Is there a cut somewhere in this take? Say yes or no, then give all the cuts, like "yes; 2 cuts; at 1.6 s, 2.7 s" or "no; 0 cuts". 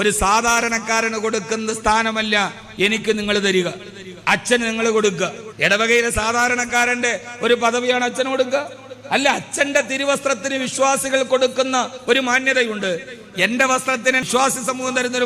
yes; 2 cuts; at 5.4 s, 14.3 s